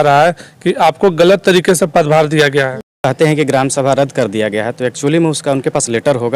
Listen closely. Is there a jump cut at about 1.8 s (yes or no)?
no